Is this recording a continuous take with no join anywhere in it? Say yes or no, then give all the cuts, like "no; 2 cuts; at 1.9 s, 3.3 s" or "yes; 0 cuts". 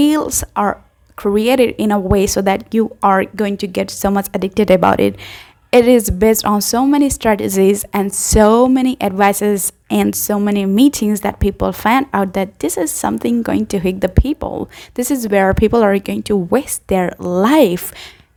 yes; 0 cuts